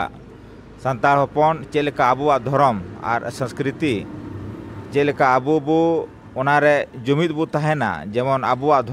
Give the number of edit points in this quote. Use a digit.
0